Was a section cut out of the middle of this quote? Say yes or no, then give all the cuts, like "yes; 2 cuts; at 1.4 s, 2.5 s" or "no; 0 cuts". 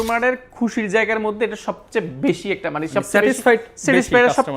no; 0 cuts